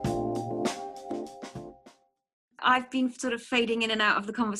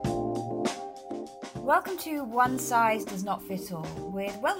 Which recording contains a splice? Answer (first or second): second